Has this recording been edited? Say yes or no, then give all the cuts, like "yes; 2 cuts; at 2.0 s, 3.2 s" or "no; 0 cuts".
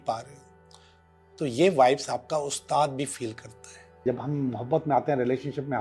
yes; 1 cut; at 4.0 s